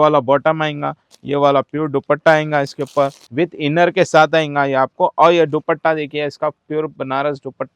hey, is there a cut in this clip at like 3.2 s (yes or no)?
yes